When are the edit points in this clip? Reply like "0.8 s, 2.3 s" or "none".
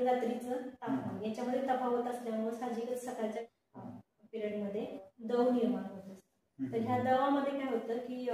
3.4 s, 5.1 s